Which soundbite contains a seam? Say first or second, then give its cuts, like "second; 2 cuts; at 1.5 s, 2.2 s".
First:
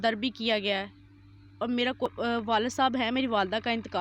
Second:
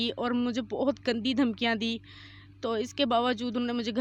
first; 1 cut; at 2.1 s